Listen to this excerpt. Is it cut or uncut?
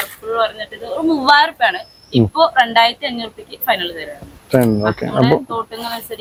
uncut